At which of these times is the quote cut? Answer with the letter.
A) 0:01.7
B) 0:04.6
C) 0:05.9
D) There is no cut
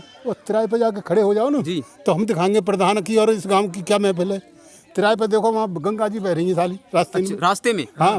D